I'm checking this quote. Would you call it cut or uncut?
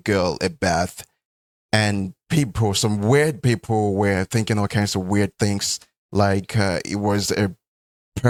uncut